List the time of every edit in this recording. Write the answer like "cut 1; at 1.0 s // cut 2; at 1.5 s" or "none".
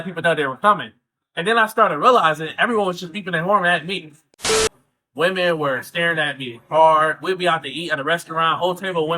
cut 1; at 4.6 s